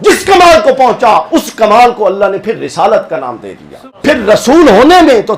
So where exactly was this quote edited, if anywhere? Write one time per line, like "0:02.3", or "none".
0:03.8